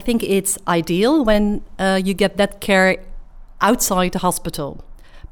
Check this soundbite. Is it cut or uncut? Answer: uncut